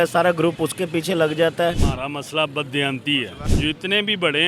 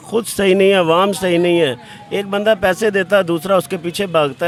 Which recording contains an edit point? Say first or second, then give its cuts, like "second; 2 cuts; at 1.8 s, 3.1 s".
first; 2 cuts; at 1.9 s, 3.4 s